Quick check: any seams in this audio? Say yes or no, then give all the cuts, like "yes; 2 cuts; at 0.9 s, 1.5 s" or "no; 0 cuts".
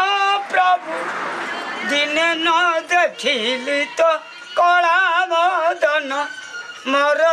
no; 0 cuts